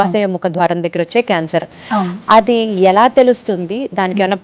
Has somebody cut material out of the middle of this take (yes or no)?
no